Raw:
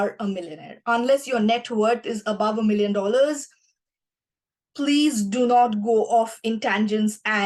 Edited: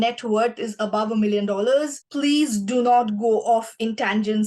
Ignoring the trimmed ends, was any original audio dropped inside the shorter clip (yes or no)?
yes